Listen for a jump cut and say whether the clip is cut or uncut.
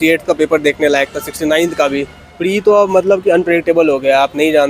cut